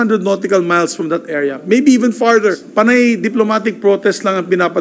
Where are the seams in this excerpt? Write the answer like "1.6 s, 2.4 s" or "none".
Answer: 2.4 s